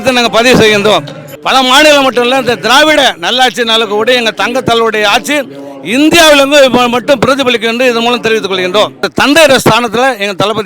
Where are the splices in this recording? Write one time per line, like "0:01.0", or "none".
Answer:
0:01.4
0:09.1